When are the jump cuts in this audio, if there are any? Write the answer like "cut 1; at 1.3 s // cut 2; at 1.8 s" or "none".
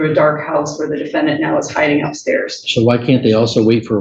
none